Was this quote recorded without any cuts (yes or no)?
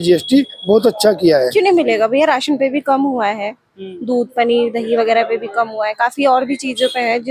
no